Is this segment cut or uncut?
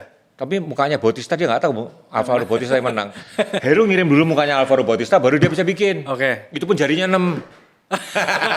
uncut